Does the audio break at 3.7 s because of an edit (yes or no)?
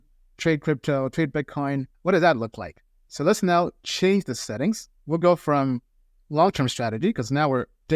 no